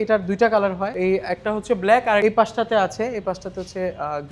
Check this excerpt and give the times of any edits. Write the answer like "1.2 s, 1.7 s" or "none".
0.9 s, 2.2 s